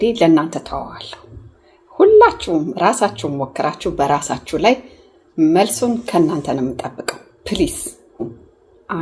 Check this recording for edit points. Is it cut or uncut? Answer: cut